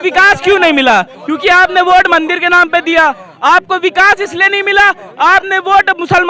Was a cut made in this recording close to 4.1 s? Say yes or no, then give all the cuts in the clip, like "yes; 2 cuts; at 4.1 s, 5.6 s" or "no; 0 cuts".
no; 0 cuts